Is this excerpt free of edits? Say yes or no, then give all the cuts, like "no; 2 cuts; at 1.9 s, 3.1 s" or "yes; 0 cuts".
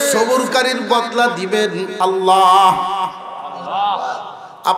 yes; 0 cuts